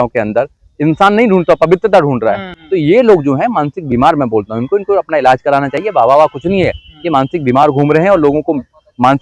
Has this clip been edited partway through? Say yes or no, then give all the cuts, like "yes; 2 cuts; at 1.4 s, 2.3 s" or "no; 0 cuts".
yes; 1 cut; at 2.5 s